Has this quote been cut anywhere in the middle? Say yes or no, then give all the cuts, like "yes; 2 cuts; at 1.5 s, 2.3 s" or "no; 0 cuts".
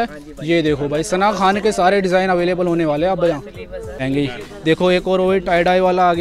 yes; 1 cut; at 4.0 s